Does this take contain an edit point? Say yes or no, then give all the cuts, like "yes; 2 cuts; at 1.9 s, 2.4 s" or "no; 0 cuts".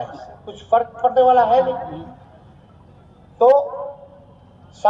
no; 0 cuts